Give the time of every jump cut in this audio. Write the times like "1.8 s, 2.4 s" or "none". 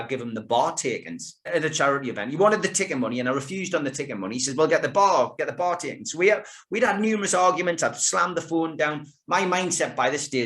1.5 s